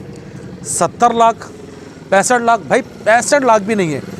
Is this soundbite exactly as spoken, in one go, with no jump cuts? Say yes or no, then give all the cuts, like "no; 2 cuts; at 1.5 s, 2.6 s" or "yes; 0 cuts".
yes; 0 cuts